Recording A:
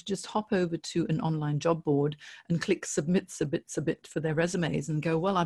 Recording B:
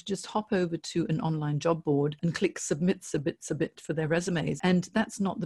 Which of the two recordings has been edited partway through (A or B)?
B